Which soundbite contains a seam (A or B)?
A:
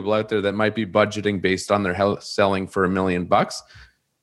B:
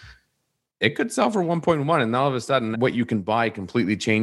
B